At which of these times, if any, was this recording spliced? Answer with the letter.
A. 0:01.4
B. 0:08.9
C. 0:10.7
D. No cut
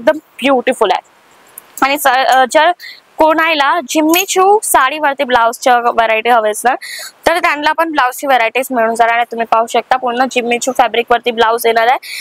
D